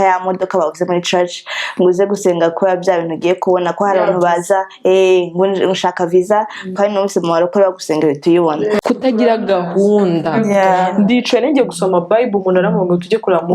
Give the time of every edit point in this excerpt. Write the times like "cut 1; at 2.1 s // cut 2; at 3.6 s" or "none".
cut 1; at 8.8 s